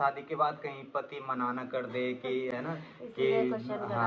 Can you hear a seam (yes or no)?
no